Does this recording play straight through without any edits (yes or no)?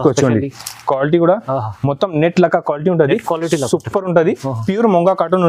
yes